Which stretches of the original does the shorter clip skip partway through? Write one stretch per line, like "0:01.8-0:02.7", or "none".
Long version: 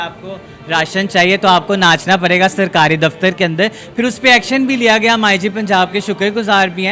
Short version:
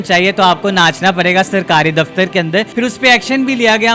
0:03.8-0:03.9